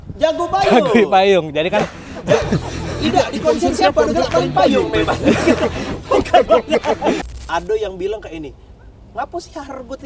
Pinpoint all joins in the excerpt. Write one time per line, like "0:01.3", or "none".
0:07.3